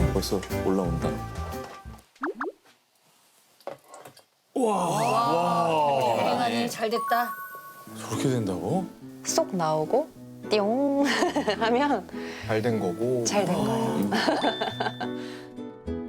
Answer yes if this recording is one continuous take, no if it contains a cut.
no